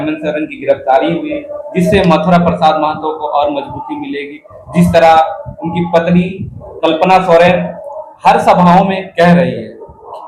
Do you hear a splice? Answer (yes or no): no